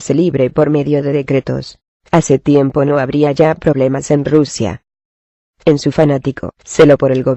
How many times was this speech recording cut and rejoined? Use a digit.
0